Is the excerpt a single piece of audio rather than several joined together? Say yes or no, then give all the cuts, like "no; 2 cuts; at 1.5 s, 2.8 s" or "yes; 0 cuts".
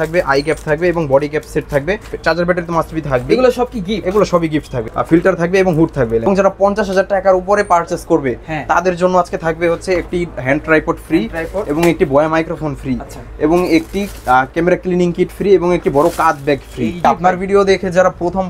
no; 4 cuts; at 2.1 s, 4.8 s, 6.2 s, 17.0 s